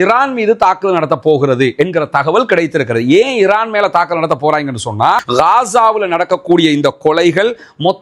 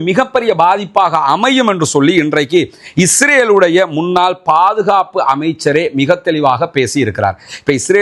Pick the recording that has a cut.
first; 1 cut; at 5.2 s

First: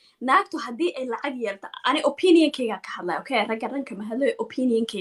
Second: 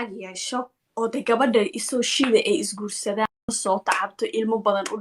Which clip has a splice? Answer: second; 1 cut; at 3.6 s

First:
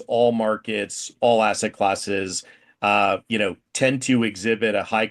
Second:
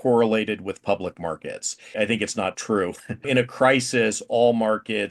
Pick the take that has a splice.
second; 2 cuts; at 1.9 s, 3.3 s

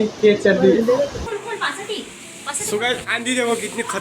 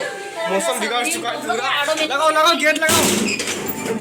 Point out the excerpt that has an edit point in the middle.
first; 1 cut; at 1.2 s

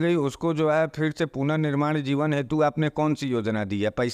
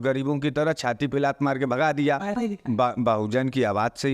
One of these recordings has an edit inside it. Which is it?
second; 1 cut; at 2.4 s

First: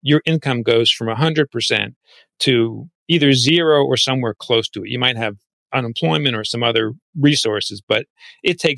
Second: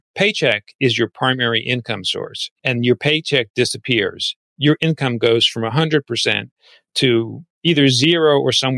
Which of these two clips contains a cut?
second; 1 cut; at 2.5 s

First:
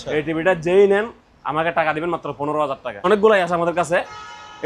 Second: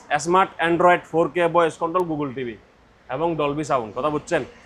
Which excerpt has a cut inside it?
first; 1 cut; at 3.1 s

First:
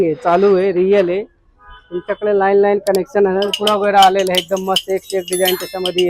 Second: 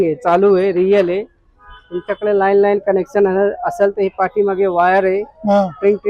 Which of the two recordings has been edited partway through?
first; 1 cut; at 3.5 s

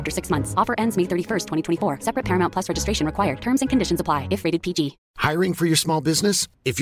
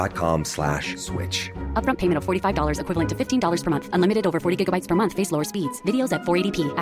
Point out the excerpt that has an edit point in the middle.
first; 1 cut; at 5.1 s

